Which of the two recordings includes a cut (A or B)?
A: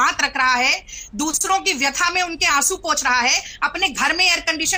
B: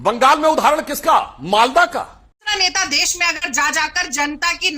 B